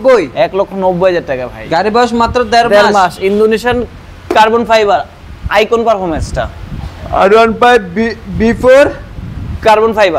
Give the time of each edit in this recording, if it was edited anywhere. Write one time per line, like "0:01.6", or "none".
0:01.5